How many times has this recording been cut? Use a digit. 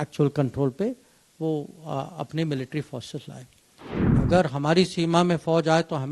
1